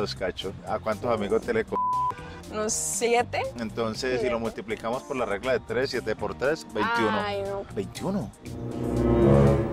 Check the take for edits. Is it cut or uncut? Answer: cut